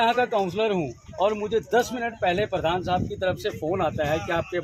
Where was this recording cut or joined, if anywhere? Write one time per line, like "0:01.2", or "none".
none